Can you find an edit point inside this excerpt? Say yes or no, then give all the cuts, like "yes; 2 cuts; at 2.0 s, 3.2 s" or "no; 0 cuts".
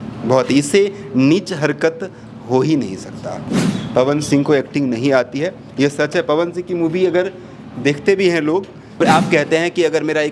yes; 2 cuts; at 3.5 s, 9.0 s